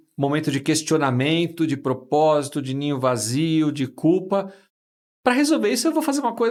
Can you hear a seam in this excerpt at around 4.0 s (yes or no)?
no